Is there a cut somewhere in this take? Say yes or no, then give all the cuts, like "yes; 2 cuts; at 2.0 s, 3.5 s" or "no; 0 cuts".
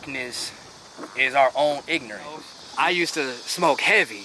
yes; 1 cut; at 2.6 s